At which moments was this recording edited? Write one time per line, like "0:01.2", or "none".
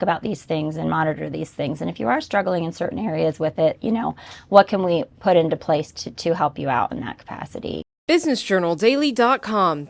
0:07.9